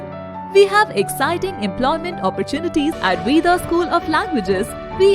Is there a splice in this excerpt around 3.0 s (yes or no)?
yes